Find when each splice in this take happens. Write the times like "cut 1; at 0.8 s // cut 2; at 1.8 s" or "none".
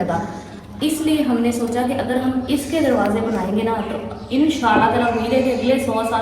none